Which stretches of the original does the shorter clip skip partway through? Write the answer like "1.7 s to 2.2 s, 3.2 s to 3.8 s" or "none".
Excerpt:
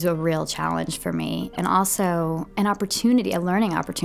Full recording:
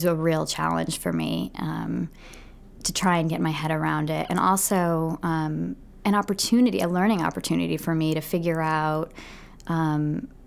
1.5 s to 4.3 s, 5.2 s to 5.9 s